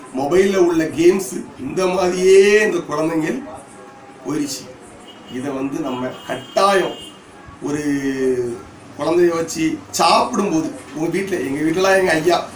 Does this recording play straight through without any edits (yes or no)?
yes